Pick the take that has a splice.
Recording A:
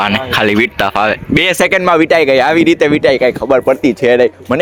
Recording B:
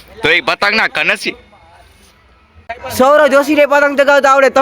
B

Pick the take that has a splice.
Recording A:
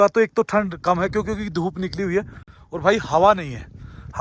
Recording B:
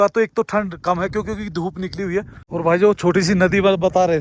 B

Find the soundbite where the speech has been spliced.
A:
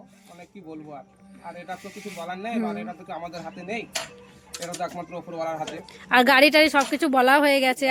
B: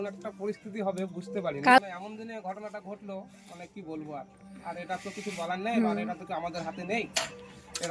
B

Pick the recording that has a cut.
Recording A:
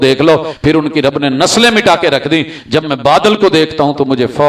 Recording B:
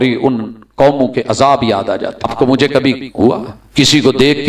B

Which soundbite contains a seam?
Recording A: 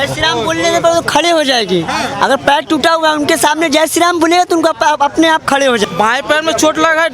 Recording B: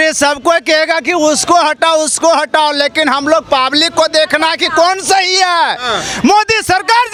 A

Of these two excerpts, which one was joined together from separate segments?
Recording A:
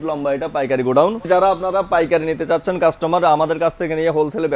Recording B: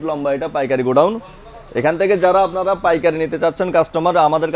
A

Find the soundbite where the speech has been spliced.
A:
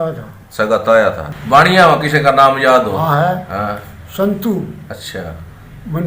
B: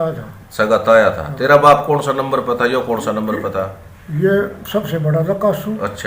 A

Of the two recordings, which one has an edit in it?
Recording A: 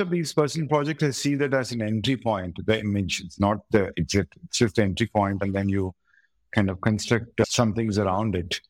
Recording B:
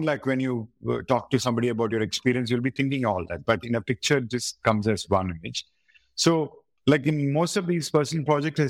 A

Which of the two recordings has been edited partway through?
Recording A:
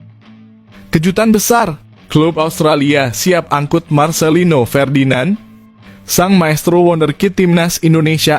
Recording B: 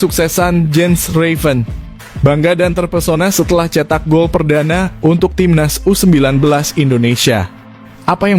A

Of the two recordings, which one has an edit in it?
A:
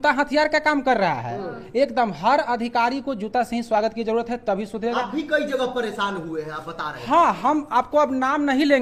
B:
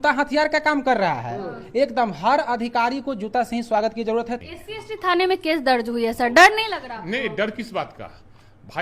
B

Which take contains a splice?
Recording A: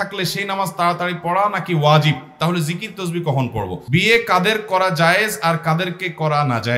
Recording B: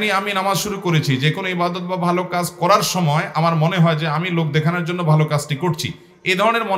A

